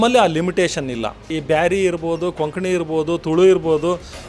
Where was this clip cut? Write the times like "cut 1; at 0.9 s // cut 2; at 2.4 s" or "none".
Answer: cut 1; at 1.3 s